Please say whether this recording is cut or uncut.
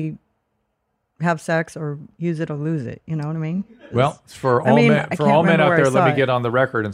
cut